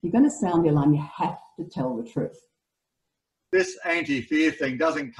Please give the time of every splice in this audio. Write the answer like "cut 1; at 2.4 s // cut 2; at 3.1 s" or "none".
cut 1; at 3.3 s